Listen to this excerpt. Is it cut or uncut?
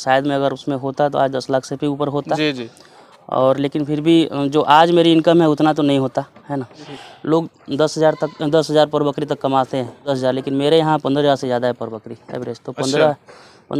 cut